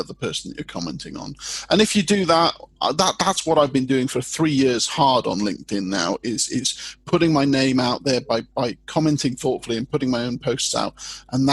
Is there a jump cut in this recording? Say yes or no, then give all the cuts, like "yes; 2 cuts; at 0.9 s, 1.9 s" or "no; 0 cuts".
no; 0 cuts